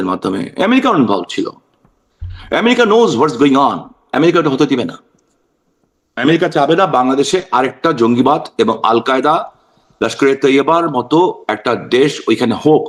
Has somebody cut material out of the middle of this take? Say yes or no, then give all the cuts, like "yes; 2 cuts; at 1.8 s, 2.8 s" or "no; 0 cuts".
no; 0 cuts